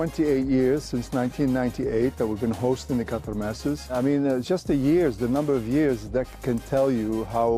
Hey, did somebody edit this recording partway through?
no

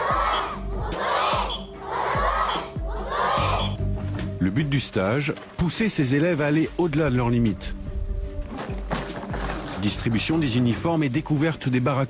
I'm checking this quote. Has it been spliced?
yes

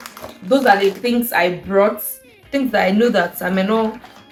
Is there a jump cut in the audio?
no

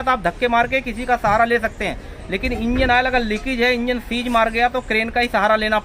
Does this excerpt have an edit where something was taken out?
no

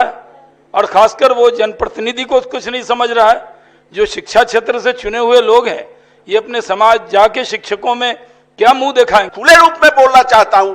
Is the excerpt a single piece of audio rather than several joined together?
no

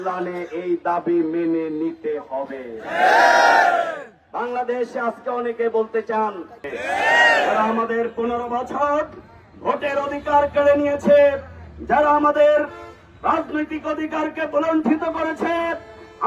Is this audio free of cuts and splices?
no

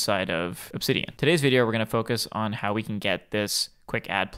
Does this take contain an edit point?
yes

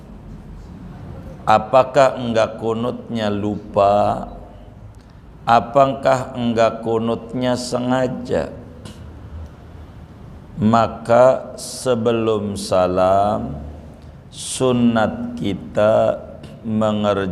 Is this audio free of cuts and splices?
yes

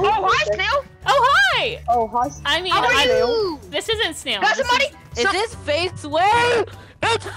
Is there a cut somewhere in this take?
yes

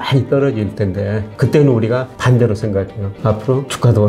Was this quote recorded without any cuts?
yes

